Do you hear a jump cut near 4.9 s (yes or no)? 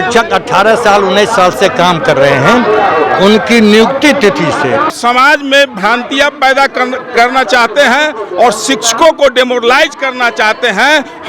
yes